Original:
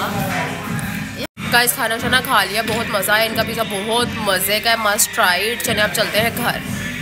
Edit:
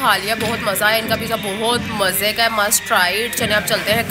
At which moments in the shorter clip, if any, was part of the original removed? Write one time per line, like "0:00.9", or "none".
none